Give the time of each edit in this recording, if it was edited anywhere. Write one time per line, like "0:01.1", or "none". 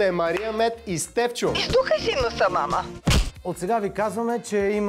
0:01.6
0:03.3